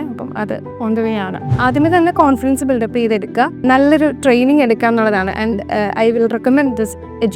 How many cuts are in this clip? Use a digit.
1